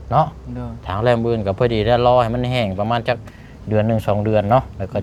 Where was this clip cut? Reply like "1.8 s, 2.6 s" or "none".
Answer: none